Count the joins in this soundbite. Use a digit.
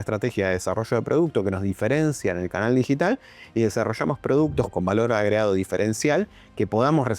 1